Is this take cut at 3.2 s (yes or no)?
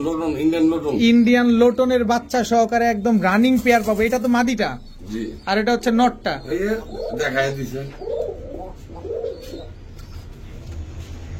no